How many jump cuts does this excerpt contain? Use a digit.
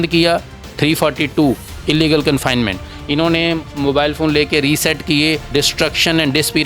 1